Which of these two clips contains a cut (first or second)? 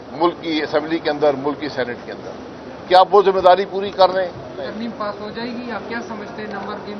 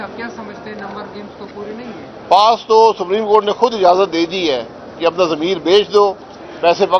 first